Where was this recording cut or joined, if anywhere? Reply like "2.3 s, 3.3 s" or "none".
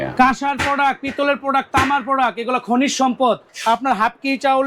3.5 s